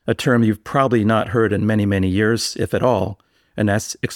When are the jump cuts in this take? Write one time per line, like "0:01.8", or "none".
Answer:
none